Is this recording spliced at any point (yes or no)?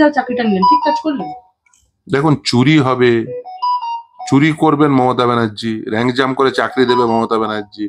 no